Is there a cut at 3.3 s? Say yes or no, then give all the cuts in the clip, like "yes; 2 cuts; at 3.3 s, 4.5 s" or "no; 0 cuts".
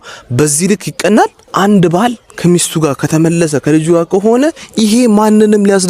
no; 1 cut; at 1.4 s